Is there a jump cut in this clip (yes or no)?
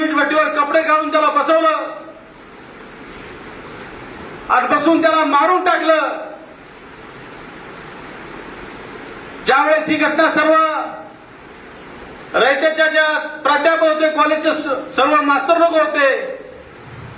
no